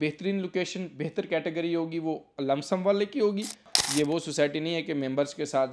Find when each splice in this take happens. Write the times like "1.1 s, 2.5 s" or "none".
3.8 s